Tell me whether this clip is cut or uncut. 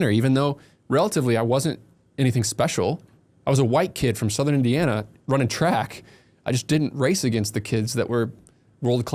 uncut